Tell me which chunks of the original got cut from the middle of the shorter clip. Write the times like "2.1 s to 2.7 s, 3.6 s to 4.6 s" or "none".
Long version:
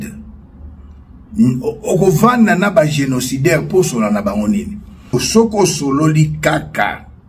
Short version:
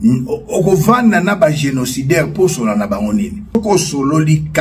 4.9 s to 5.4 s